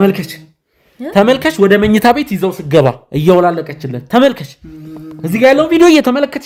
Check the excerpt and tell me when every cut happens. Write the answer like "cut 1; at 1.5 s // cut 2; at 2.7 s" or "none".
none